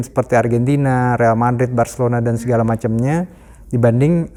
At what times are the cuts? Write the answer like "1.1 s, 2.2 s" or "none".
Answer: none